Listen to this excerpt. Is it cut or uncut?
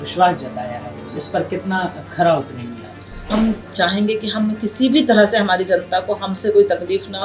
cut